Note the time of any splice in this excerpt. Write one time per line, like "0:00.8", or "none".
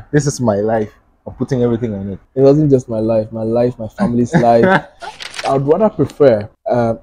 0:05.3